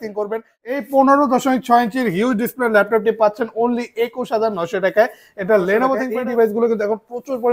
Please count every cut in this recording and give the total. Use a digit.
2